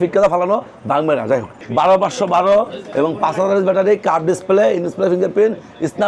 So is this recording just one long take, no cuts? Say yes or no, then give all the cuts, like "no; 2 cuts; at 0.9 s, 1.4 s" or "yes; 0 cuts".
no; 1 cut; at 1.6 s